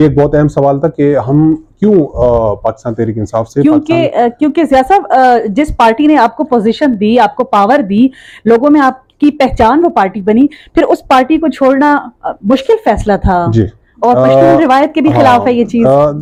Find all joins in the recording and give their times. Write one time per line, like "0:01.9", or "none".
none